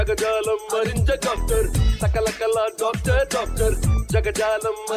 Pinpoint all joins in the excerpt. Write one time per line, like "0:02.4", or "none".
none